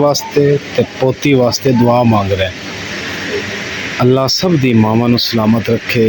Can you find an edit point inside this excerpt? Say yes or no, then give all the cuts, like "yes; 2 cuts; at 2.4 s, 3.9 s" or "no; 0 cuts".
no; 0 cuts